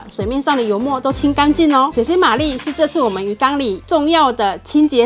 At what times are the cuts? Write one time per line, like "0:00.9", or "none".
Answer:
0:01.9
0:03.8